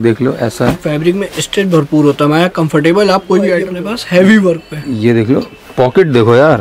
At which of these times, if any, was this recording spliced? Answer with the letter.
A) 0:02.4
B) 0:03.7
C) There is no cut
B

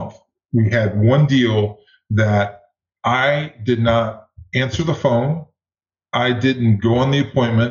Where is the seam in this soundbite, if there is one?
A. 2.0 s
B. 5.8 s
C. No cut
C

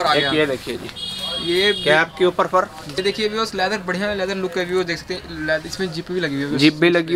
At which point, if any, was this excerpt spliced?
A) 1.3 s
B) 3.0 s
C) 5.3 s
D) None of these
B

